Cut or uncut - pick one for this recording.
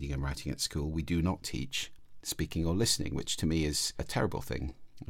cut